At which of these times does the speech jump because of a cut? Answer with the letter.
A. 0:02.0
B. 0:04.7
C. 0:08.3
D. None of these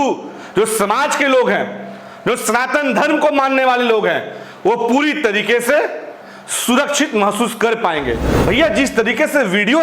C